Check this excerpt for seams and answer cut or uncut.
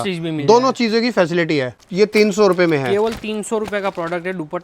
cut